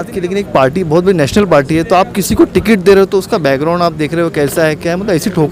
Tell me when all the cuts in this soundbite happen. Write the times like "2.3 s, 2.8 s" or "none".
none